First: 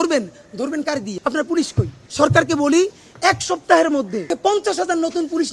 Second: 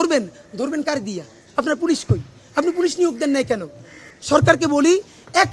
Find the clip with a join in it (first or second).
first